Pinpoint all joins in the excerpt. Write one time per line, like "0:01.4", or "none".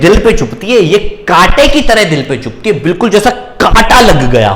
none